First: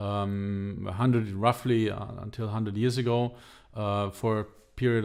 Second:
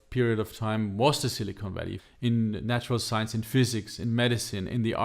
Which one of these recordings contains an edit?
second; 1 cut; at 2.0 s

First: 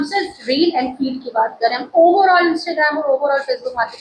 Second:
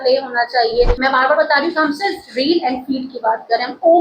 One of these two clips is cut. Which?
second; 1 cut; at 0.9 s

